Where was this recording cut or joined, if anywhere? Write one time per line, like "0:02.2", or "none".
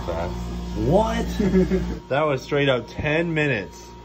0:02.0